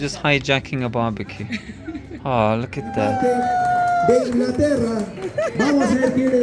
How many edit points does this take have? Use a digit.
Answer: 1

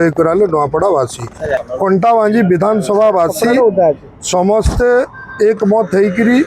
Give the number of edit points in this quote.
1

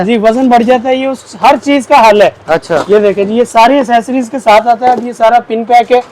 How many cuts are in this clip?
0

